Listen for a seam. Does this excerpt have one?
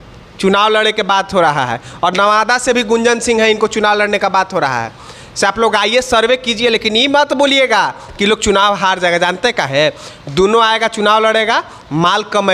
no; 0 cuts

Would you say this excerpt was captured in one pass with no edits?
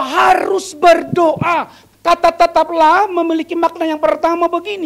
no; 1 cut; at 1.8 s

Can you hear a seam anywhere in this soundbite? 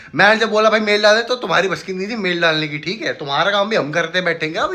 no; 0 cuts

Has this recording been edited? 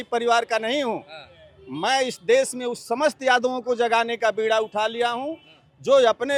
no; 0 cuts

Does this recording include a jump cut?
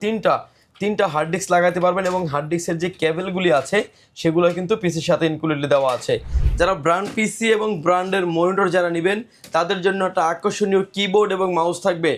yes; 1 cut; at 6.4 s

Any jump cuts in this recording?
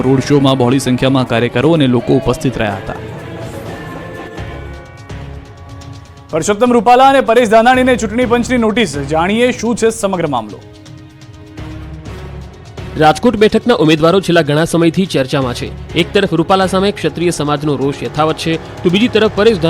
yes; 1 cut; at 18.7 s

